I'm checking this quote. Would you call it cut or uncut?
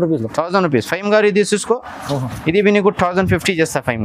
uncut